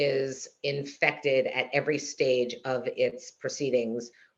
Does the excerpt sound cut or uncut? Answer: uncut